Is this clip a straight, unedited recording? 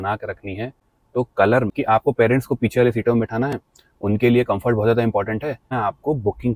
no; 2 cuts; at 1.7 s, 5.8 s

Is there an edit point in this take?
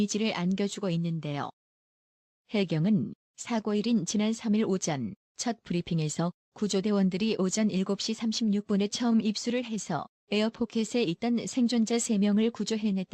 yes; 1 cut; at 11.6 s

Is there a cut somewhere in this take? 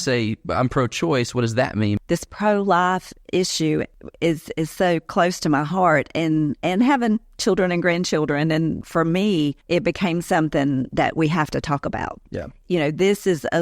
yes; 3 cuts; at 2.0 s, 8.8 s, 12.6 s

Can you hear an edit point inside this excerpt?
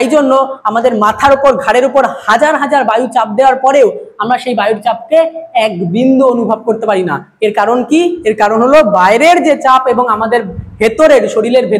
no; 0 cuts

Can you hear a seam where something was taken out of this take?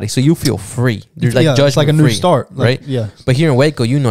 no; 0 cuts

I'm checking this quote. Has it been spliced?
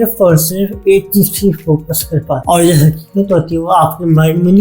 yes; 1 cut; at 2.4 s

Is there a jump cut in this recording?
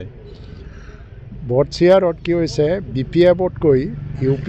no; 0 cuts

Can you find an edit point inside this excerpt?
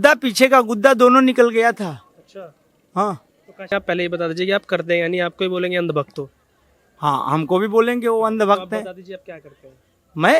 yes; 1 cut; at 3.7 s

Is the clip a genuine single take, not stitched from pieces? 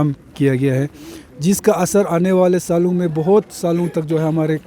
yes; 0 cuts

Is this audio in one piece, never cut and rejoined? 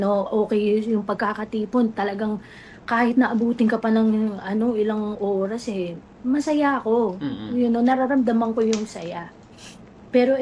yes; 0 cuts

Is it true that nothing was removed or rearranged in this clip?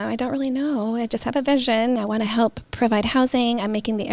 no; 1 cut; at 2.0 s

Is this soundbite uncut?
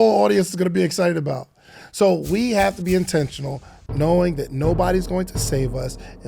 yes; 0 cuts

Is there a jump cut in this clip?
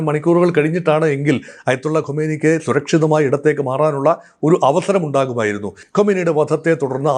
yes; 1 cut; at 5.8 s

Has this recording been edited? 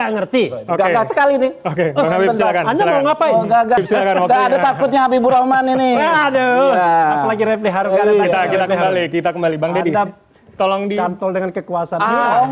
yes; 1 cut; at 3.8 s

